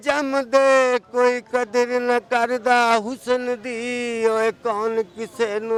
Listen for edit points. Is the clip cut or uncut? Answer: uncut